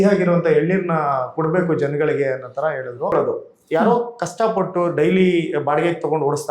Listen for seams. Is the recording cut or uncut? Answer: cut